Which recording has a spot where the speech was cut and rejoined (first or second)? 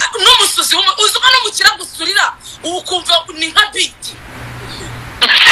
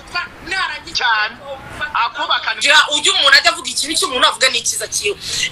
second